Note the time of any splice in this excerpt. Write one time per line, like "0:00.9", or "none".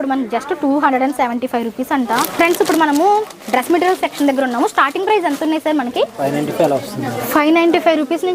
0:02.3
0:06.1